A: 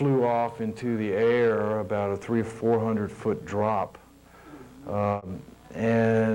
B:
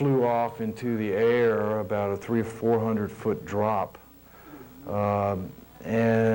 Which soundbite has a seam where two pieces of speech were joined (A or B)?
A